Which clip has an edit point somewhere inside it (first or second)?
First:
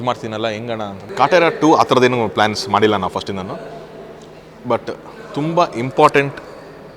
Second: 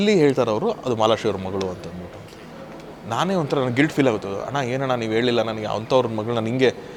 first